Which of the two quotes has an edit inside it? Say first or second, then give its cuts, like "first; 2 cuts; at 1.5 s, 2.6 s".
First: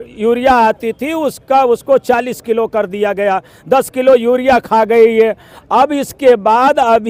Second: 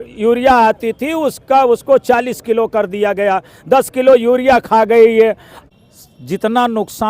second; 1 cut; at 5.6 s